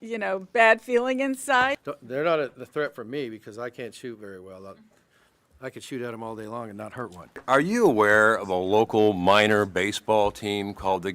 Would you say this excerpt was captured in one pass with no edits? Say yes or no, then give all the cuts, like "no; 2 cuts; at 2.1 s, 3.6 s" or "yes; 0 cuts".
no; 2 cuts; at 1.8 s, 7.3 s